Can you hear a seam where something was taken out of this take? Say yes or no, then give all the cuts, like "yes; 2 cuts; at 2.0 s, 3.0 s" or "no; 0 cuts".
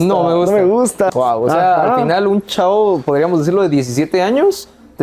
yes; 1 cut; at 1.1 s